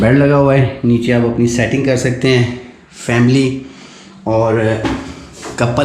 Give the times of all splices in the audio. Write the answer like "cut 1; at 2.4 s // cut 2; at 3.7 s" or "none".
none

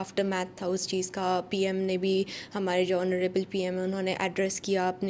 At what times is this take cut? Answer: none

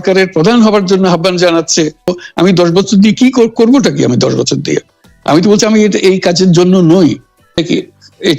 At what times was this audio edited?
cut 1; at 2.2 s // cut 2; at 7.6 s

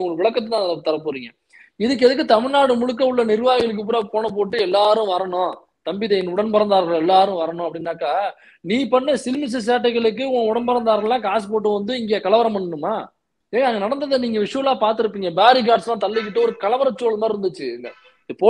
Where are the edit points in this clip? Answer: none

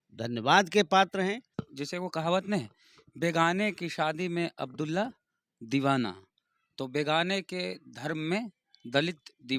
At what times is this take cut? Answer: cut 1; at 1.6 s

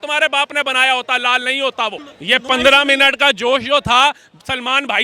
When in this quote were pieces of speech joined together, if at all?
cut 1; at 2.1 s

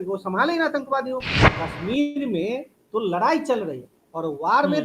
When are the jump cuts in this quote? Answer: cut 1; at 1.5 s

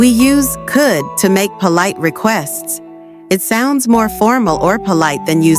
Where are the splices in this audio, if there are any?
none

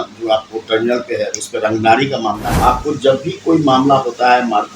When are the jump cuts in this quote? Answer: cut 1; at 2.5 s

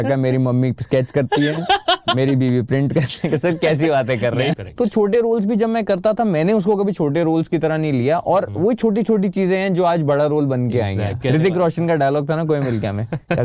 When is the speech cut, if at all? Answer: cut 1; at 4.6 s // cut 2; at 11.2 s

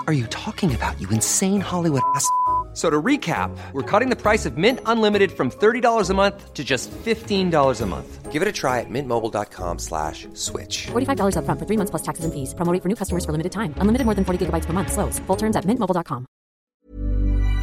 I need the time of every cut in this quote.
cut 1; at 16.6 s

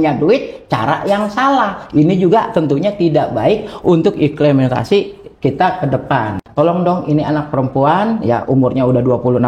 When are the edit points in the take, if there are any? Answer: cut 1; at 6.4 s

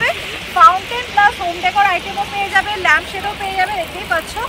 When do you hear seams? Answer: none

